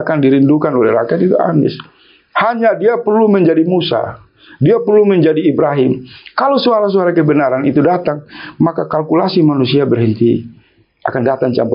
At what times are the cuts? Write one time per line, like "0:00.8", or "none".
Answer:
none